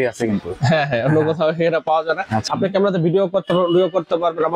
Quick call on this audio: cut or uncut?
cut